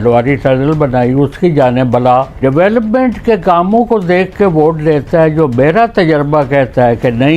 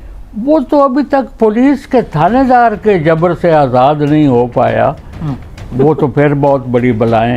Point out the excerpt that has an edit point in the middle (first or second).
first